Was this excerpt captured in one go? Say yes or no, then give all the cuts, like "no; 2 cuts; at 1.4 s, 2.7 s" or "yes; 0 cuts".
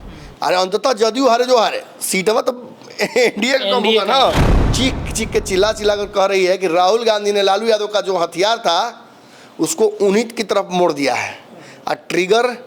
no; 1 cut; at 4.4 s